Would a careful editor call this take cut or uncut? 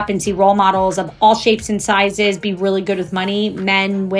uncut